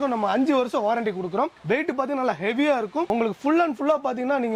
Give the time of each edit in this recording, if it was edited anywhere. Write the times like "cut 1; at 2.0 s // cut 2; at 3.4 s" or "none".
none